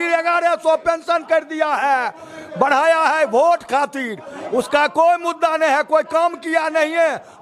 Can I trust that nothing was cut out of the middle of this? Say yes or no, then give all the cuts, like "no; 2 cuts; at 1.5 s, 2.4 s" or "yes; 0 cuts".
yes; 0 cuts